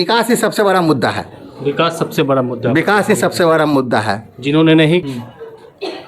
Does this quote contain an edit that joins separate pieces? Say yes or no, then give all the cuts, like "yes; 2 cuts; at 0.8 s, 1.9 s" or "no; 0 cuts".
yes; 1 cut; at 5.0 s